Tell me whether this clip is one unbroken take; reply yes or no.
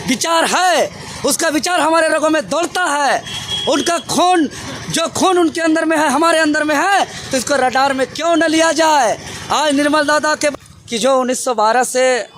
no